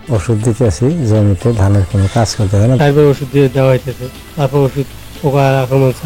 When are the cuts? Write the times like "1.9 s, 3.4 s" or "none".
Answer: 2.8 s